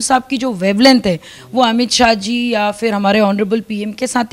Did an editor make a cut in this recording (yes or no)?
no